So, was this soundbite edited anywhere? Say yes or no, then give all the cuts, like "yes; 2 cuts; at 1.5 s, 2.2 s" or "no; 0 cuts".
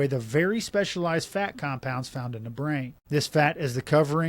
yes; 1 cut; at 3.0 s